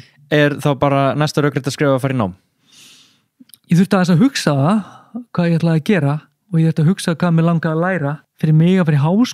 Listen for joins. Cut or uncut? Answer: cut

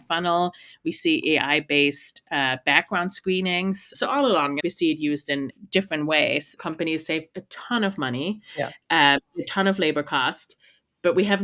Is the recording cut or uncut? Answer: cut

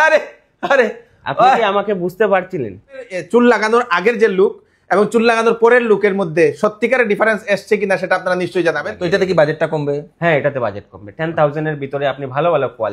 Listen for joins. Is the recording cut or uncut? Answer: cut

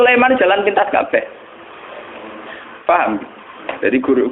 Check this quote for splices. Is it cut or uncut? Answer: uncut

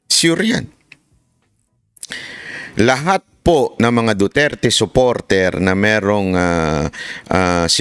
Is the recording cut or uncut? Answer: uncut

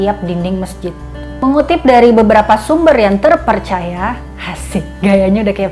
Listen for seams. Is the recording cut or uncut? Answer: cut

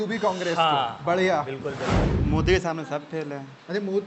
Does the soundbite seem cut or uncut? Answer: cut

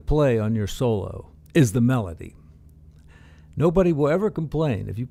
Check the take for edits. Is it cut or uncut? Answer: uncut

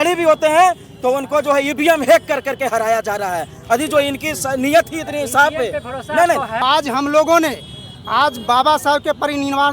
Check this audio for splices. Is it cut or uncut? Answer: cut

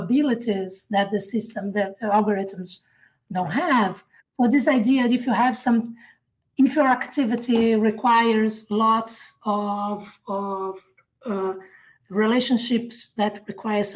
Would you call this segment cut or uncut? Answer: uncut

